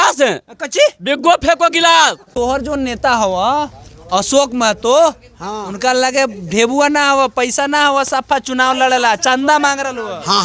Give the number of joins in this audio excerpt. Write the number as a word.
one